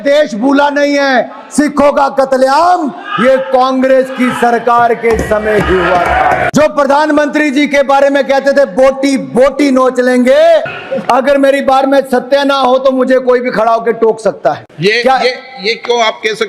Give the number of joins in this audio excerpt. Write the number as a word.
three